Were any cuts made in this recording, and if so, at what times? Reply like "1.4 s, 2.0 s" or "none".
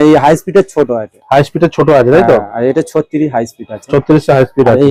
none